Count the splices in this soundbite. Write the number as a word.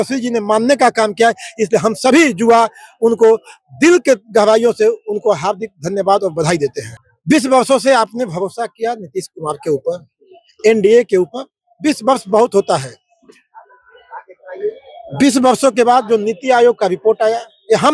one